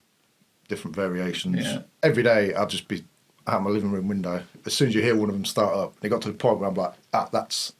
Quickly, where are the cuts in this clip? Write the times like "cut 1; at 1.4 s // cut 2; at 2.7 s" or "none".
cut 1; at 1.9 s